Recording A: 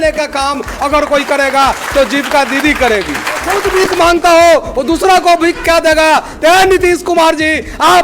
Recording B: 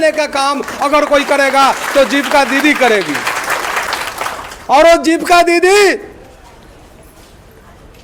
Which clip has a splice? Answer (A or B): A